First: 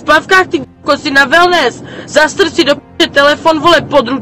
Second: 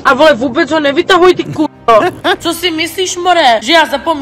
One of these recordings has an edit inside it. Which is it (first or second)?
second